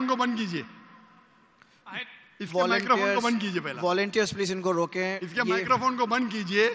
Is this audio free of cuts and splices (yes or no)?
yes